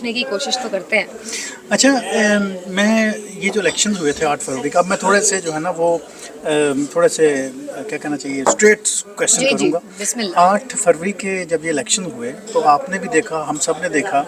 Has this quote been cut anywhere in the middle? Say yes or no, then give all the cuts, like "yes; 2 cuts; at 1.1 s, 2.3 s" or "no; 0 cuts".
no; 0 cuts